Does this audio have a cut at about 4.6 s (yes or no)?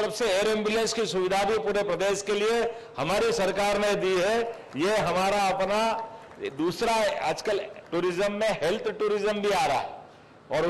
no